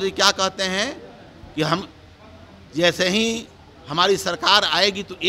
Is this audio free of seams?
yes; 0 cuts

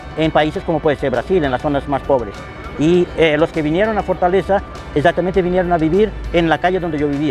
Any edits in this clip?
no; 0 cuts

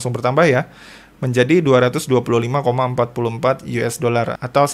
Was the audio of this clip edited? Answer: no; 0 cuts

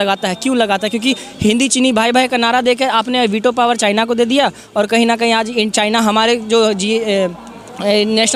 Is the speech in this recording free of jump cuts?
yes; 0 cuts

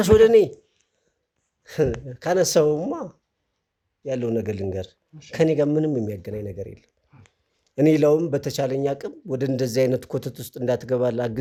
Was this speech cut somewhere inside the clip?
no; 0 cuts

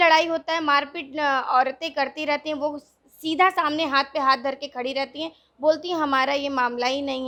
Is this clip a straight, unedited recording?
yes; 0 cuts

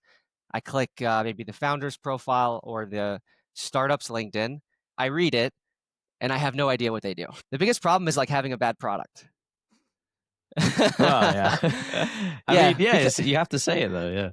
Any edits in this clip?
yes; 1 cut; at 7.3 s

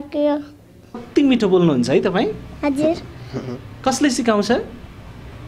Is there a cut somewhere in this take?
yes; 1 cut; at 1.0 s

